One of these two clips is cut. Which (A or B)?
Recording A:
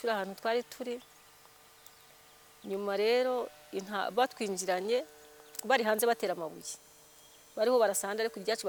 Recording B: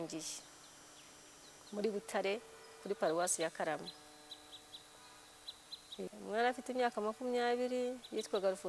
B